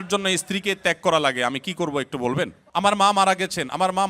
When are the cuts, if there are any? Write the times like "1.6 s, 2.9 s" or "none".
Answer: 2.6 s